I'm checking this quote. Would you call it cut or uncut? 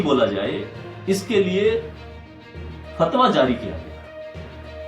cut